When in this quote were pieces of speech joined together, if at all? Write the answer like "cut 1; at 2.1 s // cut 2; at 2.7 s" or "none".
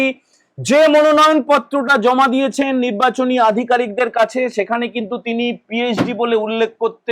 none